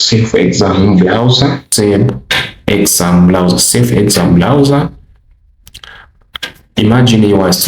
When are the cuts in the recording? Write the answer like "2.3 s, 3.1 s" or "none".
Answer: 1.7 s

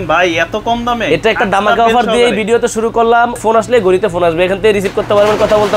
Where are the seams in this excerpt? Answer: 3.4 s

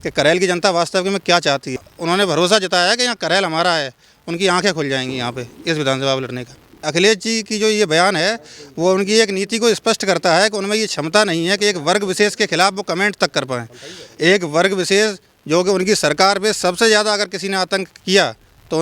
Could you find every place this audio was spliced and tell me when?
1.7 s, 6.9 s

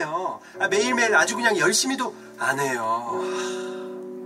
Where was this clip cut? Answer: 3.2 s

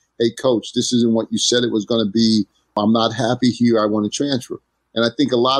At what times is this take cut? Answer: 2.8 s

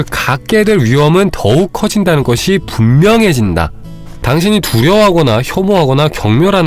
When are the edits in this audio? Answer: 4.2 s

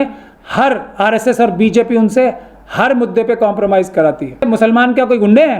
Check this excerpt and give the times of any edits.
4.5 s

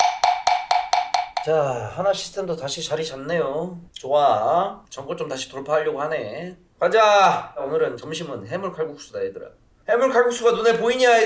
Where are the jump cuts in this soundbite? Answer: 1.3 s

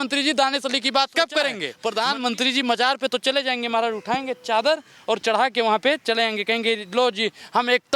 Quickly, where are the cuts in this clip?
1.7 s

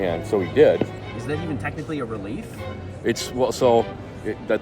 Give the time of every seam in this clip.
1.0 s

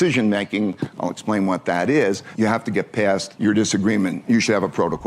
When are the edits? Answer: 2.3 s, 3.3 s, 4.2 s

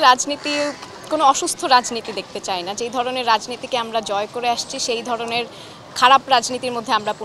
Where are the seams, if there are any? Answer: none

